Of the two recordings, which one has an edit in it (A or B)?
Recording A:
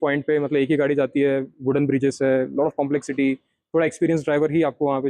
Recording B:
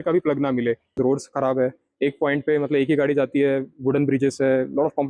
B